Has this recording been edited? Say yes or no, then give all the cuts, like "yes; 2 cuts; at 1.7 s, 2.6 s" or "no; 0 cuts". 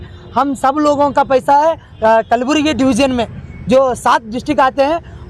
yes; 1 cut; at 1.9 s